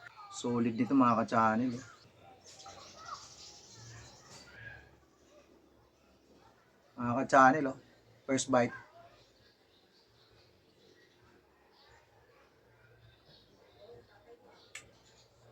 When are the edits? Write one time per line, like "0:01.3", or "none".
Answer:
0:02.8